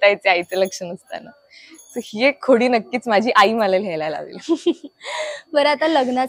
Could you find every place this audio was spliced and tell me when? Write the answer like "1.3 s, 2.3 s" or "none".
none